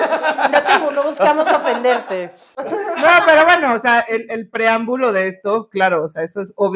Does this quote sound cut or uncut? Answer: uncut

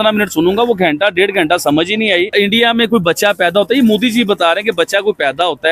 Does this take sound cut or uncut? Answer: cut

